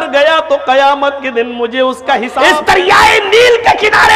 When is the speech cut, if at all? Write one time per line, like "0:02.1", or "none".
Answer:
0:02.3